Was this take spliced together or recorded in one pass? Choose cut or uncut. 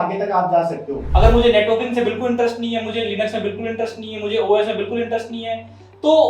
cut